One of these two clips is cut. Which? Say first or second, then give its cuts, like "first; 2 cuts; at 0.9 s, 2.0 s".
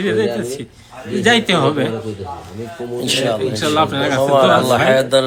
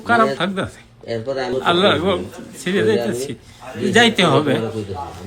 second; 1 cut; at 1.5 s